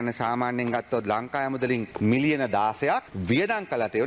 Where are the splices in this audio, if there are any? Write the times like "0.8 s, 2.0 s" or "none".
1.9 s, 3.1 s